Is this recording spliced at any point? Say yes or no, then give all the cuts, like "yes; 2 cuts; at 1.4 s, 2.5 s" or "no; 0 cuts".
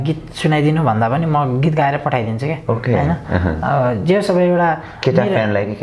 no; 0 cuts